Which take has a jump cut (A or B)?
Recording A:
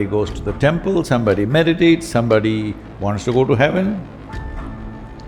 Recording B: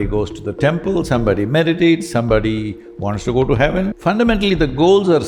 B